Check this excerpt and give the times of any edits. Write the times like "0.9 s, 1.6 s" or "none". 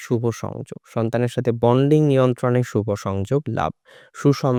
none